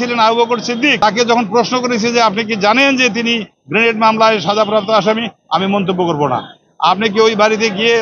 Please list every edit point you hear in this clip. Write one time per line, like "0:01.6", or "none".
0:01.0

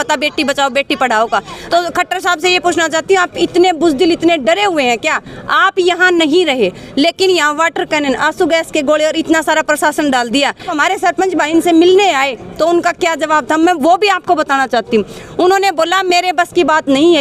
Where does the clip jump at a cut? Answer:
0:01.5
0:10.7

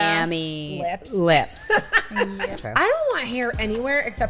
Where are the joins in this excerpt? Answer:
0:02.5

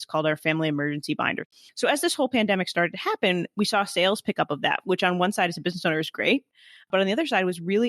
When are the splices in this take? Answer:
0:01.4

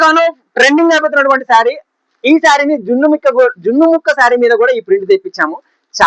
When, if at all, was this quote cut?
none

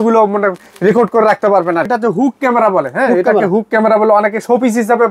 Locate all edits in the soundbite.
0:01.9

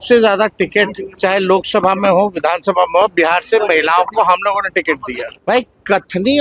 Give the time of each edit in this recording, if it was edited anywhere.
0:01.0
0:05.3

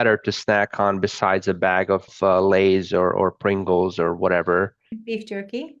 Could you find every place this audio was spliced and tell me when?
0:02.1

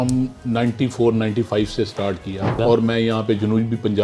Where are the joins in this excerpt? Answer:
0:02.6

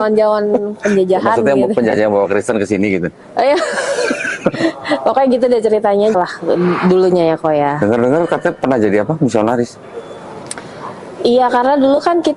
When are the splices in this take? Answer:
0:06.1

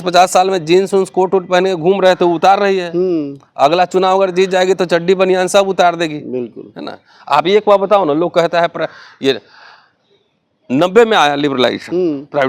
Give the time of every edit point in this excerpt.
none

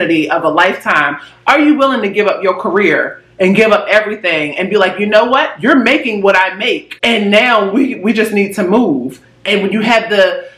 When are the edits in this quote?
0:06.9

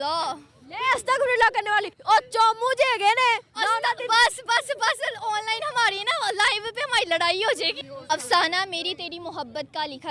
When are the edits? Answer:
0:07.7

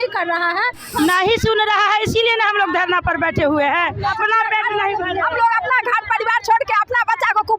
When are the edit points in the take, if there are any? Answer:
0:00.9

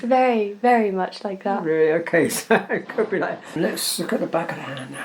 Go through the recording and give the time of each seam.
0:03.6

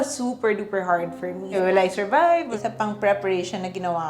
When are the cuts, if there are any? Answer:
0:01.5
0:02.5

